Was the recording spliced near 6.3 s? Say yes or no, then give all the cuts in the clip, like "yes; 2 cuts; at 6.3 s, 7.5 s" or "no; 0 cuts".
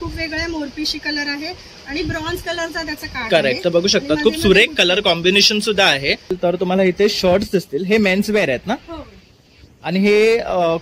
yes; 1 cut; at 6.3 s